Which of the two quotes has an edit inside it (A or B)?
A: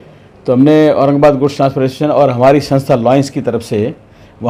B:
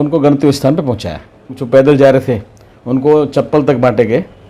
B